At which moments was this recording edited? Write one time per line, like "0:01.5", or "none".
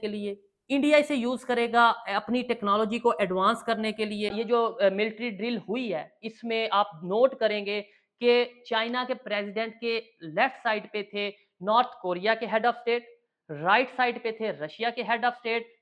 0:04.4